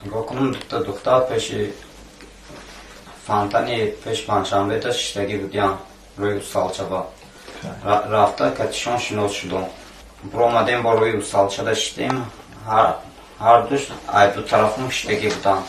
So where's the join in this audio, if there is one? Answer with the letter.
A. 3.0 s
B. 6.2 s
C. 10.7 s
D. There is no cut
C